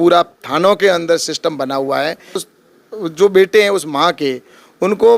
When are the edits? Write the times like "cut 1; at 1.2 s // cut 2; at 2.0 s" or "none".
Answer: cut 1; at 2.5 s